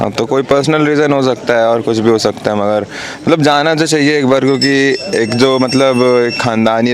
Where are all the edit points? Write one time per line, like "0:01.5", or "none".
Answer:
none